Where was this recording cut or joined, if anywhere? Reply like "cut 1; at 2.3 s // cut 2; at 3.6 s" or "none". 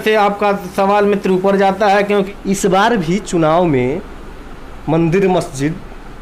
cut 1; at 2.3 s

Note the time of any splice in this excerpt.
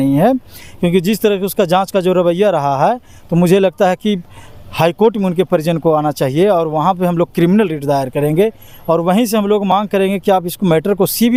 none

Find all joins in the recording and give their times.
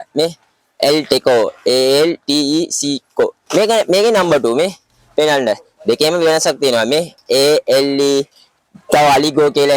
cut 1; at 3.4 s

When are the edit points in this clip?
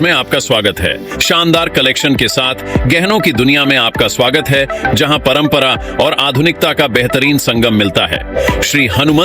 cut 1; at 1.1 s // cut 2; at 8.3 s

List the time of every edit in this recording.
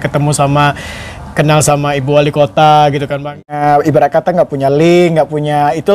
cut 1; at 3.5 s

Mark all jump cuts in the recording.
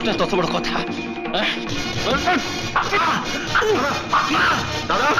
none

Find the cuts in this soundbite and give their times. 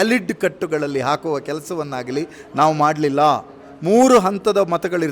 none

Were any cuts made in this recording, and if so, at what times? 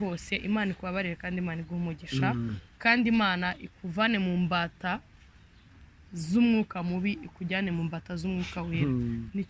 none

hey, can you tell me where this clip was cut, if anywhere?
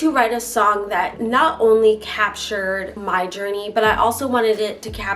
cut 1; at 1.1 s // cut 2; at 2.9 s

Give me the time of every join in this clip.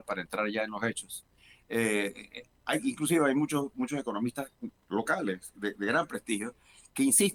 none

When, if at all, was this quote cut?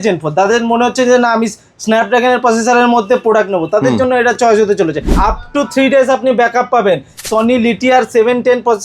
cut 1; at 5.2 s // cut 2; at 7.2 s

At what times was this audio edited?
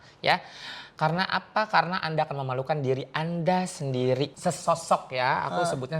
cut 1; at 4.3 s

